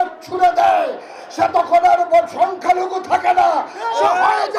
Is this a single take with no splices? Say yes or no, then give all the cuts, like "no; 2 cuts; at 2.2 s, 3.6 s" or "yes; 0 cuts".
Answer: yes; 0 cuts